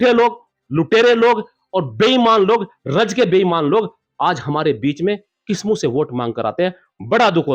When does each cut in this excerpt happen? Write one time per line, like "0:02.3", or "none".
none